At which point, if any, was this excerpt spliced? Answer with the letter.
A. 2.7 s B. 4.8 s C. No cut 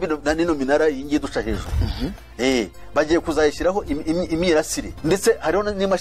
B